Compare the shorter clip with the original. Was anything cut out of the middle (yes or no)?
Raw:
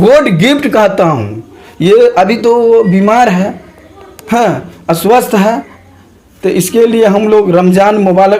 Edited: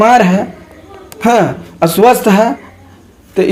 no